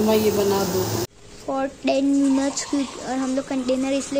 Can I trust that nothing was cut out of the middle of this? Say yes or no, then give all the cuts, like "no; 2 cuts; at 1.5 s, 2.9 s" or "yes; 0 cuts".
no; 1 cut; at 1.1 s